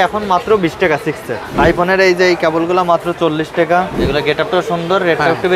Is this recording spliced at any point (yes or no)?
yes